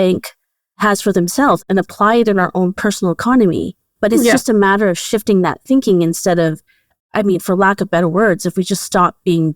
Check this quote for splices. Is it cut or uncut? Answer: cut